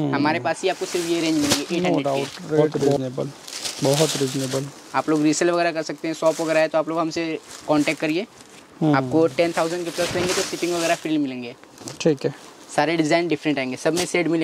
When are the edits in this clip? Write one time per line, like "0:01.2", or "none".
none